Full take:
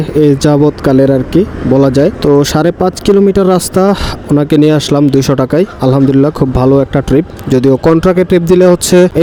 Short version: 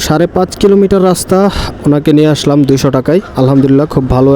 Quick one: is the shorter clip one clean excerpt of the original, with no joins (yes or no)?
yes